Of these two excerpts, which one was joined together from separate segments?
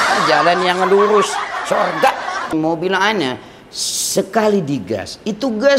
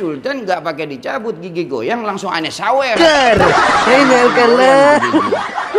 first; 1 cut; at 2.5 s

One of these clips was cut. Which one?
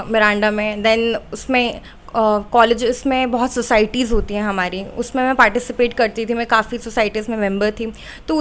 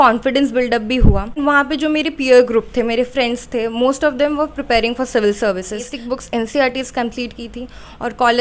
second; 2 cuts; at 1.4 s, 6.0 s

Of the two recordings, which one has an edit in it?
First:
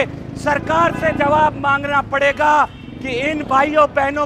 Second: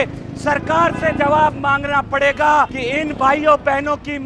second; 1 cut; at 2.8 s

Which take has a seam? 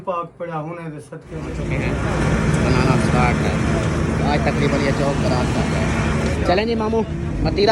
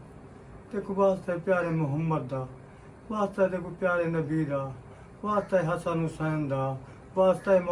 first; 1 cut; at 1.6 s

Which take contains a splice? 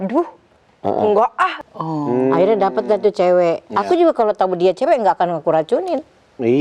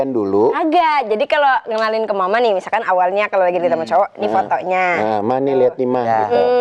first; 1 cut; at 1.6 s

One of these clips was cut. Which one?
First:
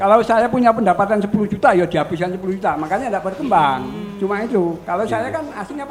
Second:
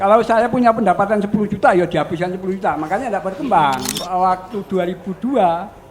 second; 1 cut; at 4.0 s

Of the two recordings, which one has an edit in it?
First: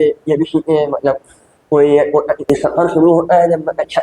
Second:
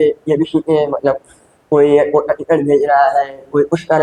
first; 1 cut; at 2.5 s

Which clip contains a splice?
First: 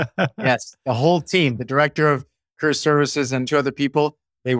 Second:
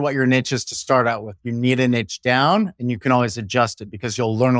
first; 1 cut; at 3.4 s

